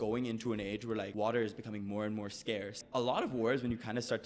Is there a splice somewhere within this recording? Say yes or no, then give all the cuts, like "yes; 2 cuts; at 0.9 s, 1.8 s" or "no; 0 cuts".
yes; 2 cuts; at 1.1 s, 2.8 s